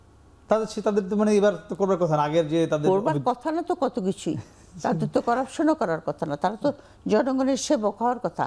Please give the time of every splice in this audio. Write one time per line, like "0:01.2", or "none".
none